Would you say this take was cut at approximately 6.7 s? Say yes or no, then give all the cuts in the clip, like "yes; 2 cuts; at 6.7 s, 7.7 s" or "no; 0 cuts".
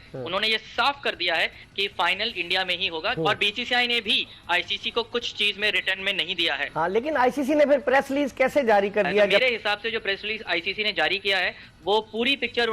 yes; 3 cuts; at 3.1 s, 6.7 s, 9.4 s